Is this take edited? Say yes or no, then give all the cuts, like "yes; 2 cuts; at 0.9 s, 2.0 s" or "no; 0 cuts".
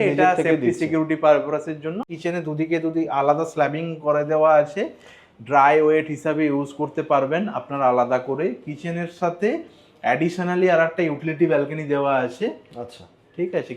yes; 1 cut; at 2.1 s